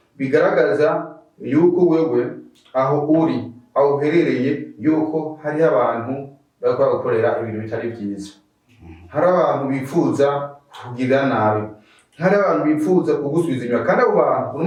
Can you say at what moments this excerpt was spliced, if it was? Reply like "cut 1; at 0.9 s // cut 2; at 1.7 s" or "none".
none